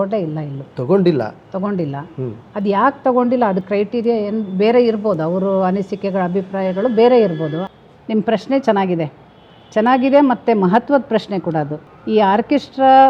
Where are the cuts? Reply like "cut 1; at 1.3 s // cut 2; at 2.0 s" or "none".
cut 1; at 7.6 s // cut 2; at 11.8 s